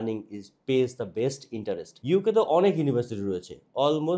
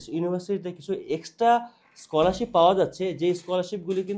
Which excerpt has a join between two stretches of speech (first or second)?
first